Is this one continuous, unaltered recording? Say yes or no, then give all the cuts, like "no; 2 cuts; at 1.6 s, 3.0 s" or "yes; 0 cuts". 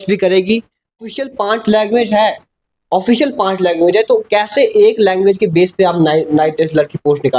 no; 1 cut; at 1.1 s